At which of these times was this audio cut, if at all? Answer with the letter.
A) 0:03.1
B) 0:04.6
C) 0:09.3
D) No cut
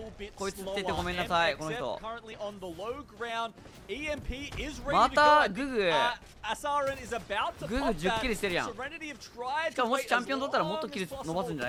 D